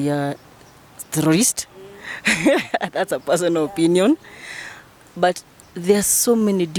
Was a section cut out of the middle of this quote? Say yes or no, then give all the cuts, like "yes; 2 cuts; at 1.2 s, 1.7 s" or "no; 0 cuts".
no; 0 cuts